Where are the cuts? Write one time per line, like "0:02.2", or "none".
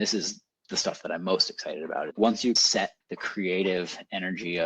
0:02.1